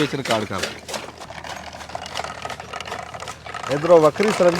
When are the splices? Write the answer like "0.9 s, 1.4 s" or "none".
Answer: 1.2 s